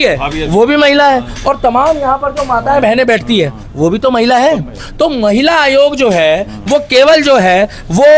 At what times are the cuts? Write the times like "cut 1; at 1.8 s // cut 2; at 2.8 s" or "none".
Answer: none